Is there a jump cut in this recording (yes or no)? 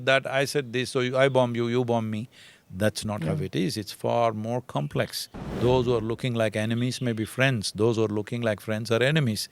yes